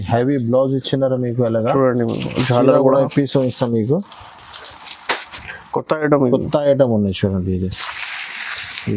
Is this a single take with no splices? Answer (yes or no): yes